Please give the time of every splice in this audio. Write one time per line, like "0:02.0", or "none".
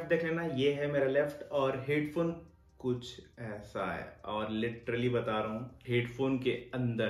none